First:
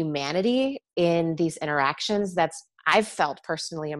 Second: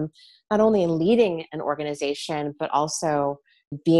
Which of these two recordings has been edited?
first; 2 cuts; at 0.8 s, 2.7 s

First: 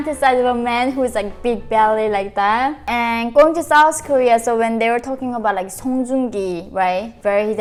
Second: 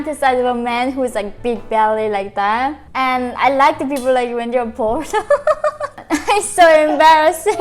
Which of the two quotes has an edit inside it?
second; 2 cuts; at 2.8 s, 5.9 s

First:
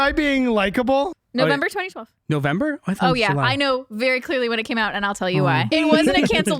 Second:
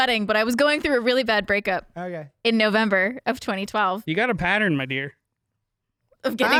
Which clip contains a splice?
first; 2 cuts; at 1.1 s, 5.7 s

